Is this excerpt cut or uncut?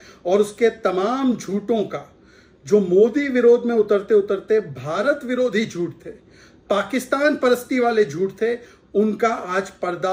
uncut